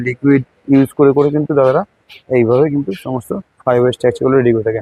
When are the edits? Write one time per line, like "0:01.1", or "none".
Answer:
none